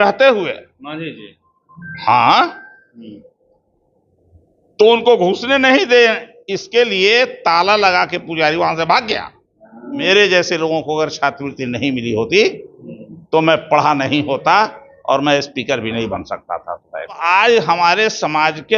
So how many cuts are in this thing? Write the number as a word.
two